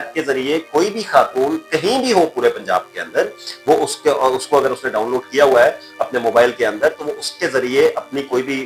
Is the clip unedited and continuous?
yes; 0 cuts

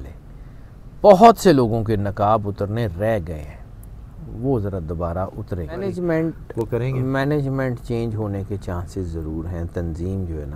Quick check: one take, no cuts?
no; 1 cut; at 5.8 s

